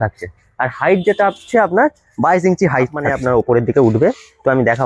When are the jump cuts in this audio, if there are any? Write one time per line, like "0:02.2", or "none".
0:03.1